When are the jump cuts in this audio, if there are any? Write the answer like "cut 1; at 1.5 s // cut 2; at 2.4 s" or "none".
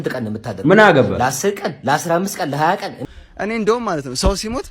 cut 1; at 3.0 s